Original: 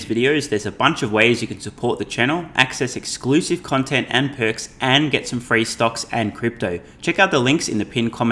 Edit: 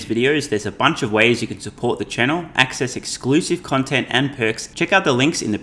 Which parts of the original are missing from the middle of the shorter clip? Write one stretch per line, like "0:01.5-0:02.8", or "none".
0:04.7-0:06.9

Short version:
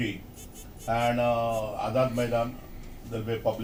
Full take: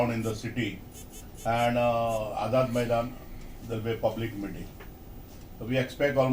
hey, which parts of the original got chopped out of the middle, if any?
none

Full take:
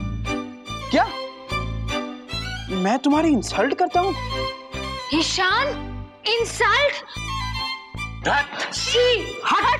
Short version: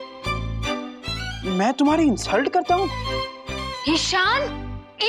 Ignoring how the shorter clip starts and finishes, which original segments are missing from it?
none

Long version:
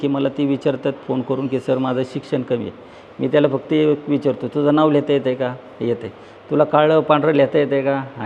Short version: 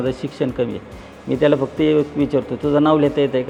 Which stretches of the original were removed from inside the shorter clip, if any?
none

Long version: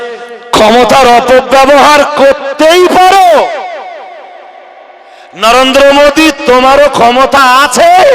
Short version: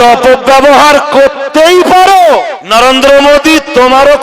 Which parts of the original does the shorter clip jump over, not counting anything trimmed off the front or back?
0:03.6-0:05.3

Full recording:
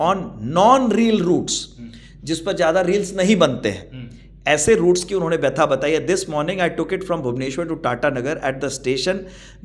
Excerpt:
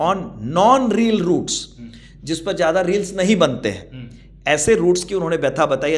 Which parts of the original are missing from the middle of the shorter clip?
none

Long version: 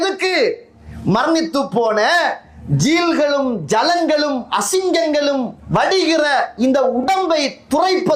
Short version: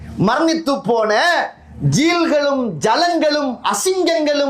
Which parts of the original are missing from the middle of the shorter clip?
none

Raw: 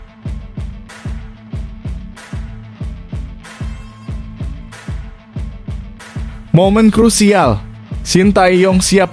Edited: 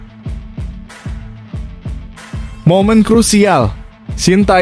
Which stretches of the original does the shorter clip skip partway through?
0:03.8-0:06.4

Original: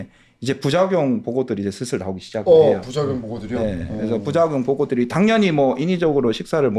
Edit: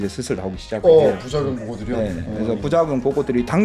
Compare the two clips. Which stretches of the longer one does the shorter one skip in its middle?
none

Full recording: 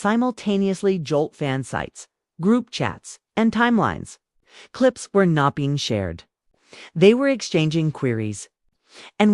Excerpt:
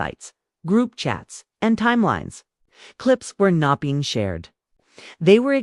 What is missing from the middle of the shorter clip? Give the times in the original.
none

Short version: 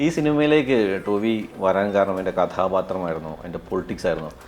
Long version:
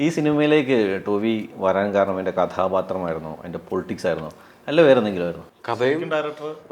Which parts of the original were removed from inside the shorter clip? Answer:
none

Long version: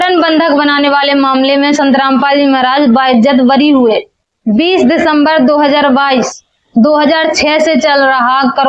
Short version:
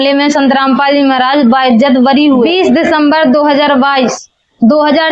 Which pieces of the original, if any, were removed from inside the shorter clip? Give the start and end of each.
0:03.9-0:04.6

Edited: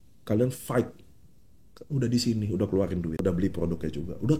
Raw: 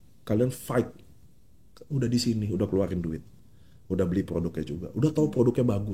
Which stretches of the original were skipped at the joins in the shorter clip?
0:03.2-0:03.9

